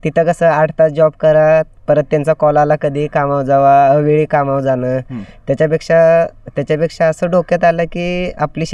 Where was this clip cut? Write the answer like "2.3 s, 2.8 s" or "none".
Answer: none